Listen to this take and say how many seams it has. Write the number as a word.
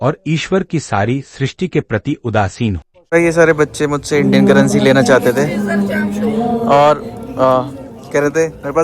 one